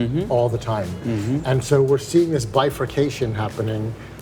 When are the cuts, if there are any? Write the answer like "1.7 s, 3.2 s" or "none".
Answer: none